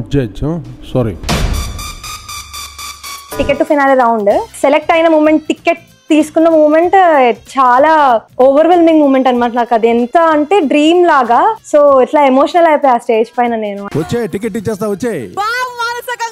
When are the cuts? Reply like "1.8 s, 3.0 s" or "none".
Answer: 3.3 s